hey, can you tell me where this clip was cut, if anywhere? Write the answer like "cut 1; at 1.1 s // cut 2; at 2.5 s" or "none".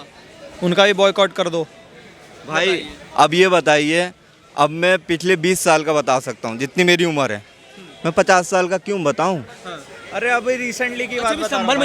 none